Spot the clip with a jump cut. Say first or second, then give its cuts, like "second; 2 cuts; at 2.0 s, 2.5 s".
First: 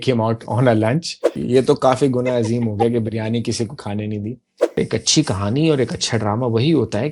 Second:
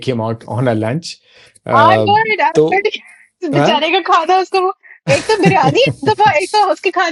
first; 2 cuts; at 1.4 s, 4.8 s